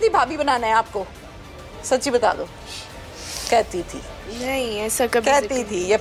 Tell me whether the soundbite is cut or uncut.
uncut